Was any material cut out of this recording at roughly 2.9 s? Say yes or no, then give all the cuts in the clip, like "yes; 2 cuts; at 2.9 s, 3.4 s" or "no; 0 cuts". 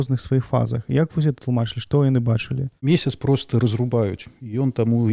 yes; 1 cut; at 2.9 s